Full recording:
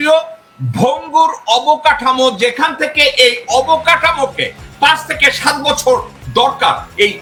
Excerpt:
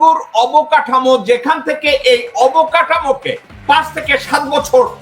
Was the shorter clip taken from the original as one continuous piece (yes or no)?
yes